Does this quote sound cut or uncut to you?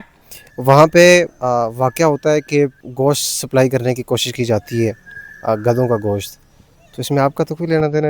cut